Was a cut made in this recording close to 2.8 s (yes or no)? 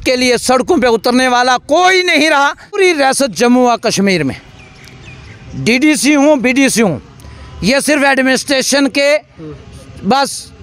yes